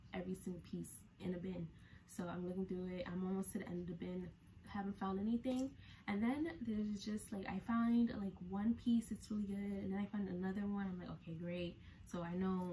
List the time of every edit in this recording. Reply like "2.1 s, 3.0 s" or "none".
none

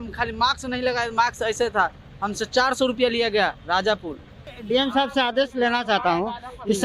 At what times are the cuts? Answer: 4.5 s

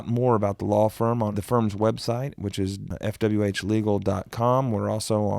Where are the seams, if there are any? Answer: 1.3 s, 2.9 s

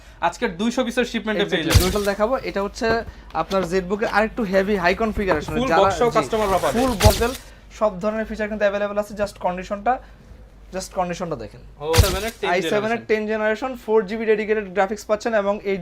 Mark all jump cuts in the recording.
1.9 s, 7.1 s, 12.0 s

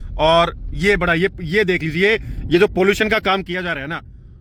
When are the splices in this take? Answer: none

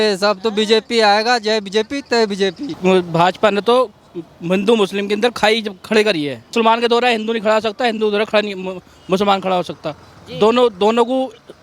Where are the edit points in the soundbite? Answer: 2.8 s, 6.5 s

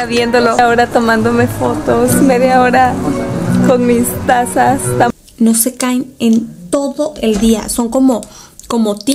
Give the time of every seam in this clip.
5.1 s

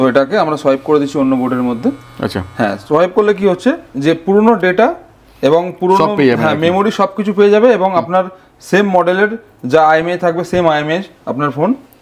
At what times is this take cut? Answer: none

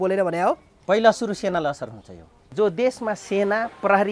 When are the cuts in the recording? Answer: 2.5 s

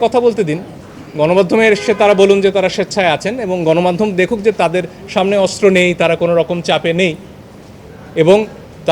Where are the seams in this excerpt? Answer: none

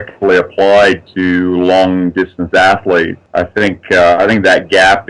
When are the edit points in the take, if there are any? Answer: 3.2 s

